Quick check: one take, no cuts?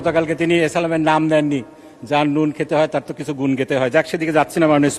yes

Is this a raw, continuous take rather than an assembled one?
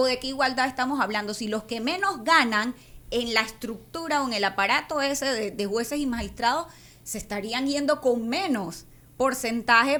yes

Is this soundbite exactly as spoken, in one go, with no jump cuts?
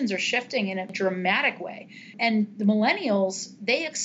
no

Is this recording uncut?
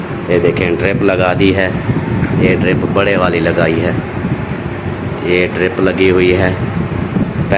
yes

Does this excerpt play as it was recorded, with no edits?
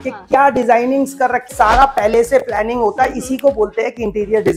no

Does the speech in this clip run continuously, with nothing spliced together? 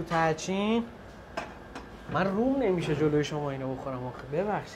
yes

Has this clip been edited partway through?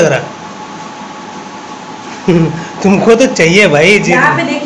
no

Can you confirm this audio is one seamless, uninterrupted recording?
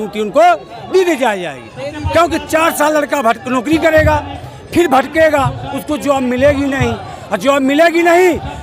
yes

